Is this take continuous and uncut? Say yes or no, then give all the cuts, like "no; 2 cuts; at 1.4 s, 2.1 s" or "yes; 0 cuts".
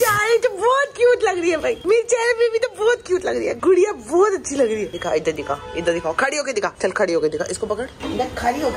yes; 0 cuts